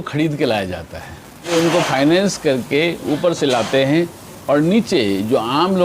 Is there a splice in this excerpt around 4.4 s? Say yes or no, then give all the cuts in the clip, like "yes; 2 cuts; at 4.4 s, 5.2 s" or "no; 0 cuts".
no; 1 cut; at 1.5 s